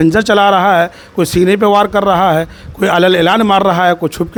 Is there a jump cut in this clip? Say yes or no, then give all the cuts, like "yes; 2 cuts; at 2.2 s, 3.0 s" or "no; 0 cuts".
no; 0 cuts